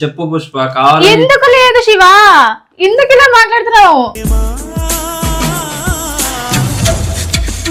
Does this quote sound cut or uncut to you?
uncut